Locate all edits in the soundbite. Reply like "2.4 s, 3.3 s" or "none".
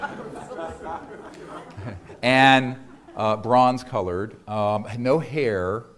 none